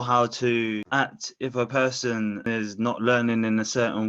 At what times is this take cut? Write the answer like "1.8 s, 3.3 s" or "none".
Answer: 0.9 s, 2.5 s